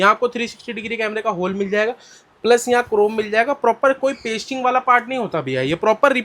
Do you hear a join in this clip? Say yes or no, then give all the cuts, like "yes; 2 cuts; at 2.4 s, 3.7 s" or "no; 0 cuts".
no; 0 cuts